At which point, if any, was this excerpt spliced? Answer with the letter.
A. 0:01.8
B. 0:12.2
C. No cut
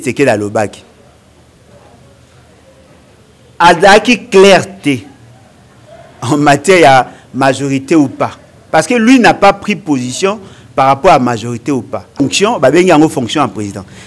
B